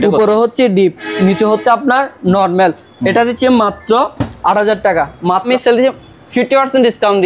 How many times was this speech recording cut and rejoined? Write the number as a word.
one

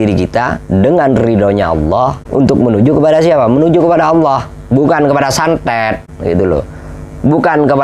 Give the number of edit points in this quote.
two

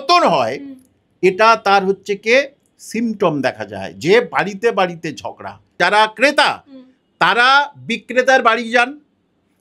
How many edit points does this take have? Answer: one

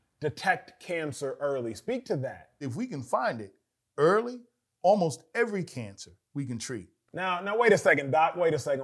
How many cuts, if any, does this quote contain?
zero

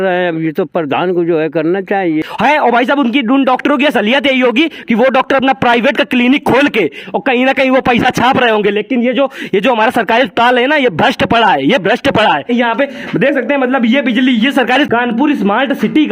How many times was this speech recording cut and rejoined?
three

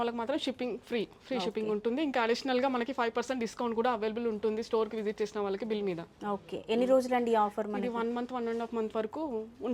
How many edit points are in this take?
zero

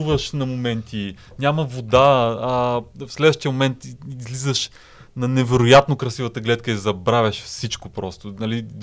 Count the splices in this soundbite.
zero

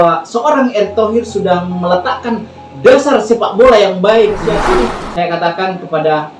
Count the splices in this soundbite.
one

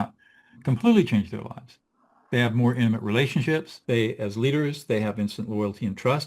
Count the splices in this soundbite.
one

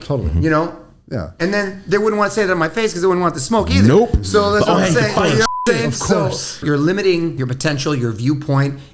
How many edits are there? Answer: two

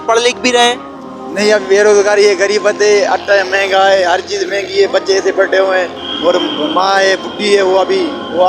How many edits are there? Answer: one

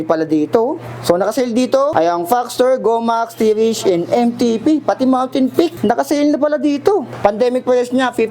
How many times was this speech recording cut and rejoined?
four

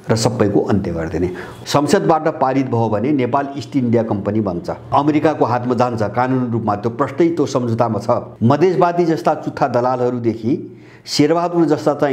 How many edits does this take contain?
three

